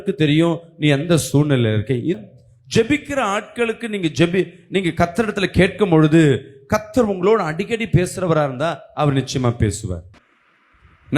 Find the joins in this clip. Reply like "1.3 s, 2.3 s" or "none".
2.2 s, 10.1 s